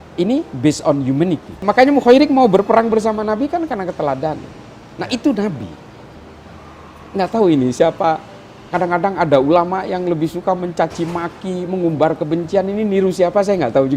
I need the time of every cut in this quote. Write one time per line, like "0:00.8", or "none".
0:01.6